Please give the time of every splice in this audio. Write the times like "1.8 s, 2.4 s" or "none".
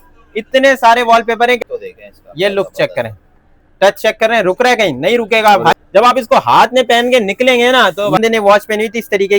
1.6 s, 5.7 s, 8.2 s